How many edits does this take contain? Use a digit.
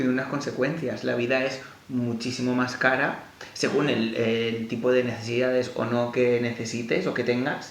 0